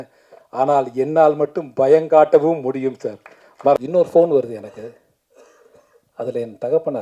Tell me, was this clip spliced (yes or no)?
yes